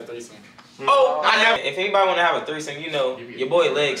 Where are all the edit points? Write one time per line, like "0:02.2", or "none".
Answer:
0:01.6

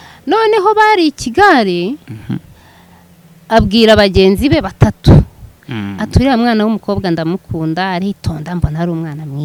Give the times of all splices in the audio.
none

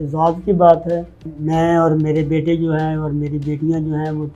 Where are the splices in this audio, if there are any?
0:01.3

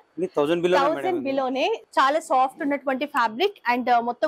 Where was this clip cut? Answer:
0:01.8

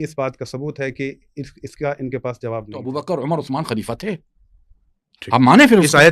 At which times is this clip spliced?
0:02.8

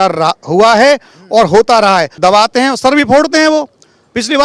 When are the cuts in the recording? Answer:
0:02.1

